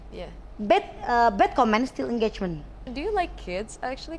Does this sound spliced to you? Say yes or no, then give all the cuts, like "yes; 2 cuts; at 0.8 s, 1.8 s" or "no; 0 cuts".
yes; 1 cut; at 2.8 s